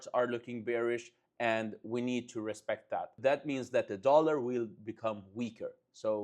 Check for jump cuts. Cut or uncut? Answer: cut